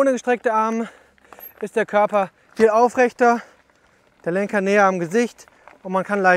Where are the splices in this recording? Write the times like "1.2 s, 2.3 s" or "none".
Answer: none